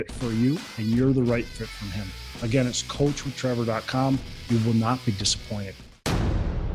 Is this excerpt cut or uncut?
cut